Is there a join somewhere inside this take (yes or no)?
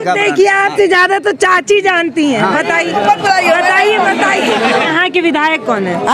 yes